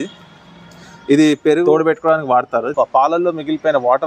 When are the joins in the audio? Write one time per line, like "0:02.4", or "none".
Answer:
0:02.7